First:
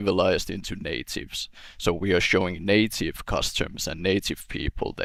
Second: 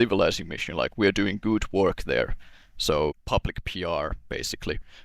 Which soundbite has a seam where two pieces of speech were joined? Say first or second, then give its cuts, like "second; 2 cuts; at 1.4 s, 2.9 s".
second; 1 cut; at 3.2 s